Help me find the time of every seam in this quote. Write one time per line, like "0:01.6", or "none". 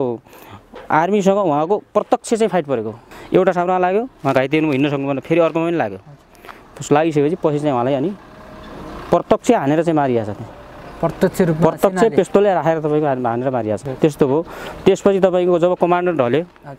0:03.1
0:13.9